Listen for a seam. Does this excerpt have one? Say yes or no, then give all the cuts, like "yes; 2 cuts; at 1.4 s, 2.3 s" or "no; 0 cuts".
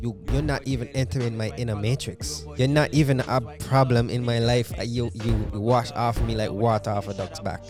no; 0 cuts